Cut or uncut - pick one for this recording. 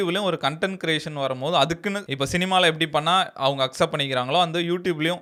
uncut